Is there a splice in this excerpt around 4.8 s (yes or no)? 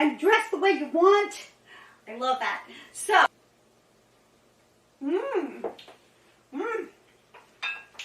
no